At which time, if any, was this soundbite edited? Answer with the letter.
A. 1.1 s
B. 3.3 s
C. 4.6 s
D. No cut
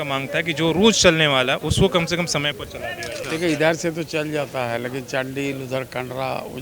B